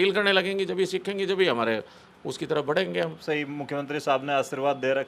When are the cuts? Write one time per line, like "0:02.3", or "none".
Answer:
0:03.2